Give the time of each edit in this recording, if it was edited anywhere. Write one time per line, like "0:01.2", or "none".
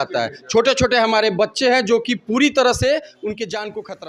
none

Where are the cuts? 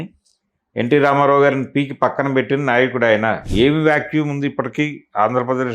0:03.4

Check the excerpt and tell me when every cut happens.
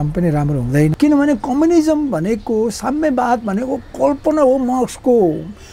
0:00.9

